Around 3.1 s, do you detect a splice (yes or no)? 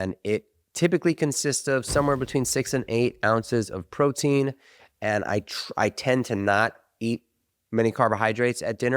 no